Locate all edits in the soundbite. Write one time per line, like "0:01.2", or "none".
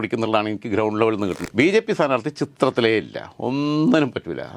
0:01.4